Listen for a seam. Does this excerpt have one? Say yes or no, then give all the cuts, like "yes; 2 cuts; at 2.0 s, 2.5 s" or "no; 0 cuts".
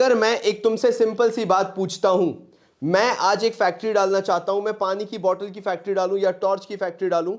no; 0 cuts